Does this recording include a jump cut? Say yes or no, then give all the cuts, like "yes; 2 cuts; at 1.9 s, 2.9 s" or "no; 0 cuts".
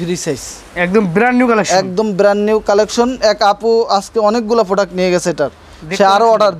no; 0 cuts